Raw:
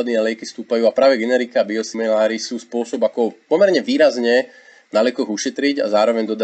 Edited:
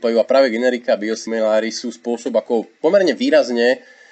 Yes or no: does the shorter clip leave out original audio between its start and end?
no